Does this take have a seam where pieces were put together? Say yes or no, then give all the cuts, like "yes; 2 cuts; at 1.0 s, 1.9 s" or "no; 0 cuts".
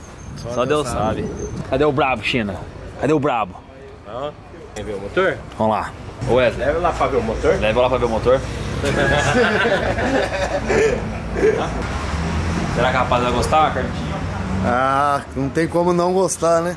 yes; 4 cuts; at 1.5 s, 4.8 s, 6.1 s, 11.8 s